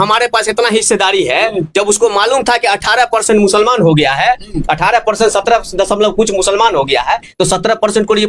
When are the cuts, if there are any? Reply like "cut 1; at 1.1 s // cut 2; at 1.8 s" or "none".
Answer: none